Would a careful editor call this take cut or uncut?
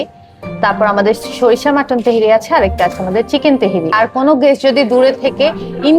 cut